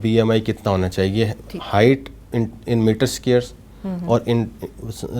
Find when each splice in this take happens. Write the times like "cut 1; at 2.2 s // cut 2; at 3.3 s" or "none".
none